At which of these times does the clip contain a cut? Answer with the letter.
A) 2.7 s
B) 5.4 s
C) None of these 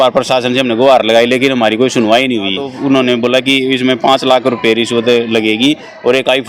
A